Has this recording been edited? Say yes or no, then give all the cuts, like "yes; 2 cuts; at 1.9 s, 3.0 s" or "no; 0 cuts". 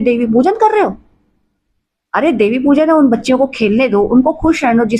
no; 0 cuts